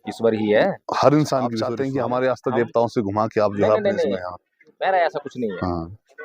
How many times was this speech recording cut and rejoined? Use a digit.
1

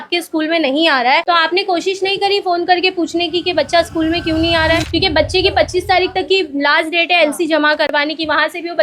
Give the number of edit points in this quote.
1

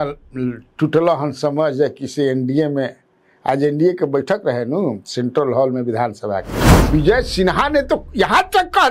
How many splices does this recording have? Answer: 1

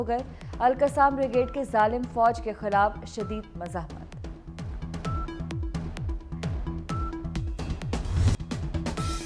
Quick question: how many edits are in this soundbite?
1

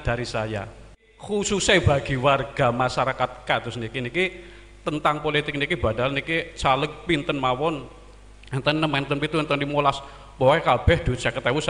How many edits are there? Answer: 1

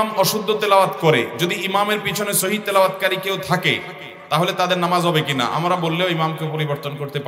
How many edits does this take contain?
0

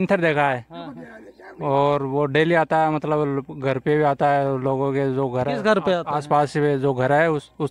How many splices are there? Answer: 0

